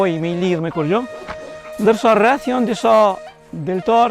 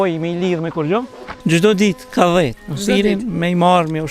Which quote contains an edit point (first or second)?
second